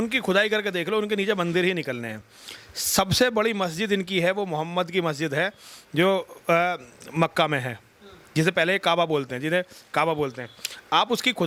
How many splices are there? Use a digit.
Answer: 0